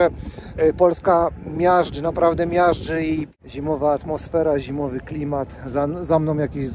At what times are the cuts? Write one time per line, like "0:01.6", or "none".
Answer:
0:03.3